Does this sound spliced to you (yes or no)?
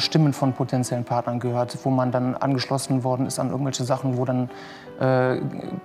no